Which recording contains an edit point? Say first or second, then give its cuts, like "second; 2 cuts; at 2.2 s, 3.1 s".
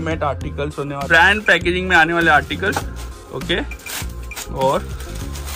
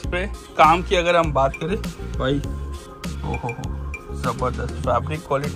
first; 1 cut; at 1.0 s